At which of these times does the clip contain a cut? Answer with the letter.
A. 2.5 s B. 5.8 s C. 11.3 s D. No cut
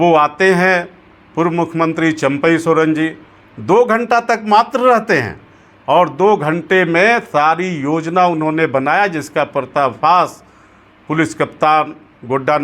D